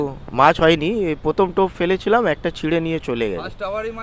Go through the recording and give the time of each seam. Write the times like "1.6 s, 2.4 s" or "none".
none